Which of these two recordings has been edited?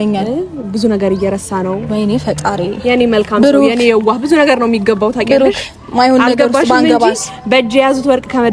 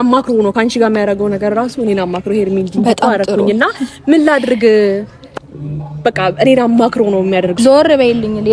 second; 1 cut; at 7.5 s

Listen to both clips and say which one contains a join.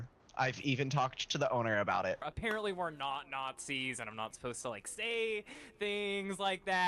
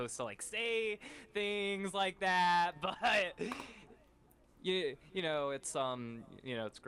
first; 1 cut; at 2.2 s

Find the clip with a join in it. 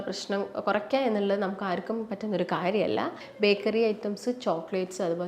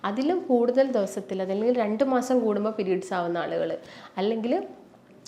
first; 1 cut; at 3.2 s

